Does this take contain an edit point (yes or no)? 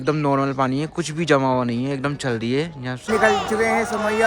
yes